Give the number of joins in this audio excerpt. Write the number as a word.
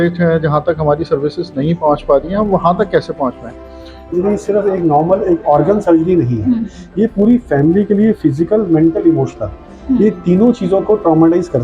one